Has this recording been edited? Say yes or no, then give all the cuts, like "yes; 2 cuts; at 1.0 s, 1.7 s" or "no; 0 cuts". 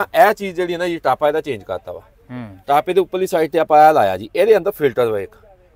no; 0 cuts